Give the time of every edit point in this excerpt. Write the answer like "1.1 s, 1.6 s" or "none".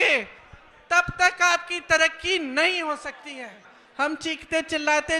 3.8 s